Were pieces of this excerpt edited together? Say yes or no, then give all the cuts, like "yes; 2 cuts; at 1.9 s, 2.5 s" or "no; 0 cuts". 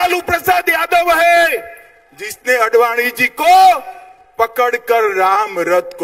no; 0 cuts